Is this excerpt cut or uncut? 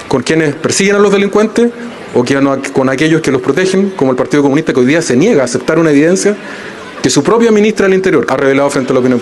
cut